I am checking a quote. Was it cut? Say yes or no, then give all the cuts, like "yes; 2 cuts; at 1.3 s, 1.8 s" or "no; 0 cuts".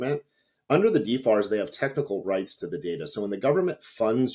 no; 0 cuts